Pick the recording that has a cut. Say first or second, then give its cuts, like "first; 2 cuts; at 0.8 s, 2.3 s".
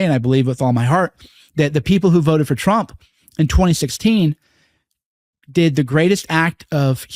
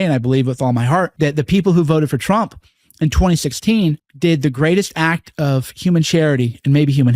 second; 2 cuts; at 1.1 s, 4.1 s